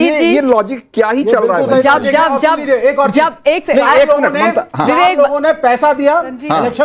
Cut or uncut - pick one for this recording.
uncut